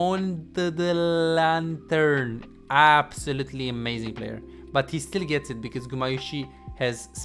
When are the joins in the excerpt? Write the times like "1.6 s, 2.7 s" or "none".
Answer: none